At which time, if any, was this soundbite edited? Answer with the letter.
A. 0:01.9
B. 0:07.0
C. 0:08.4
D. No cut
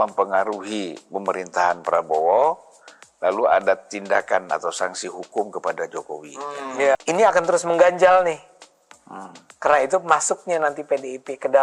B